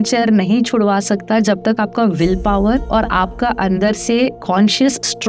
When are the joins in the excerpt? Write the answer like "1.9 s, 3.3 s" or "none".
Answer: none